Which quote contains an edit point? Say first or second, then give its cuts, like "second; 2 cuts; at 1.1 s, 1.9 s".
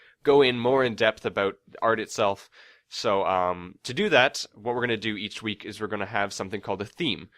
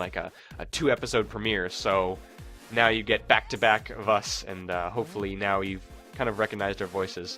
second; 1 cut; at 4.6 s